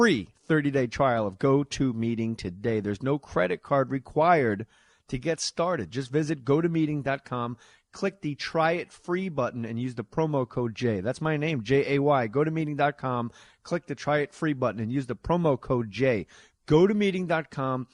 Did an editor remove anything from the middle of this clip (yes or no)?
yes